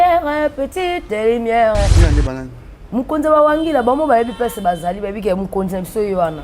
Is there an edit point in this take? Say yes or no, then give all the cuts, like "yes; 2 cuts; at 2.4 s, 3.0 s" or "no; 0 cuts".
yes; 1 cut; at 2.0 s